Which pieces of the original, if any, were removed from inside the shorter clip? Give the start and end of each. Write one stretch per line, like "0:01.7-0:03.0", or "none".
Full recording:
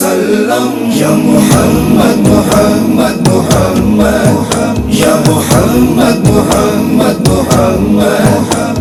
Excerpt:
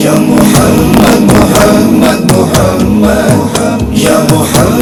none